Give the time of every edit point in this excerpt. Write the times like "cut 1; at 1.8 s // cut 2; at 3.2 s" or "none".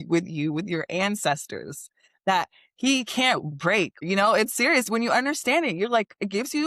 cut 1; at 4.0 s